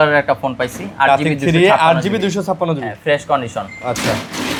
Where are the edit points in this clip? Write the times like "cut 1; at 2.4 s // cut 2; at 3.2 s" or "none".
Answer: none